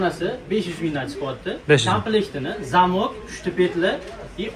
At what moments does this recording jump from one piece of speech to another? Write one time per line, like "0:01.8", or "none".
none

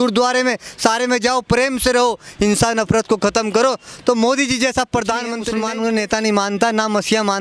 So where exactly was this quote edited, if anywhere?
0:05.4

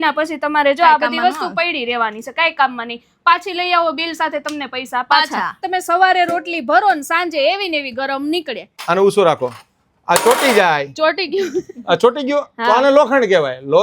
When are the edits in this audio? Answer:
0:05.6
0:08.7

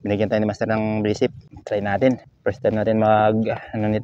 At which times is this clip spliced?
0:01.5
0:02.3

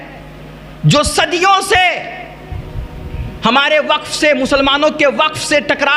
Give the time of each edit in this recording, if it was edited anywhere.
none

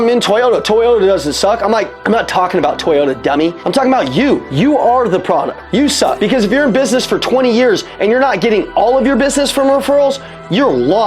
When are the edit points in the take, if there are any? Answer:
0:01.9
0:03.6
0:04.5
0:06.0

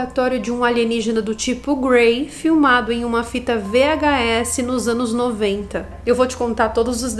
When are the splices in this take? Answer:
0:05.9

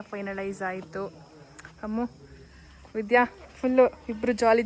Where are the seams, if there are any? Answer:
none

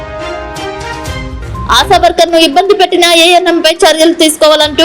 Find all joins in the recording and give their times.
0:01.6

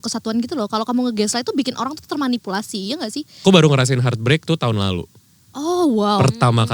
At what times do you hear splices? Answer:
0:03.3

